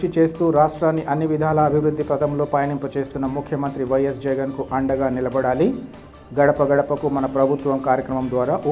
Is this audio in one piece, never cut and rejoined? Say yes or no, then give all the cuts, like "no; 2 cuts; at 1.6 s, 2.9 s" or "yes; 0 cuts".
yes; 0 cuts